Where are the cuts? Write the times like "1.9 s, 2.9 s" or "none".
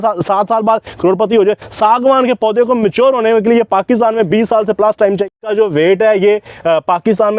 5.3 s